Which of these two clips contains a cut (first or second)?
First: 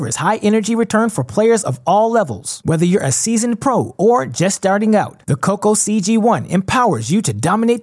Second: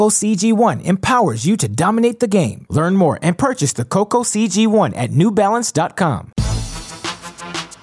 second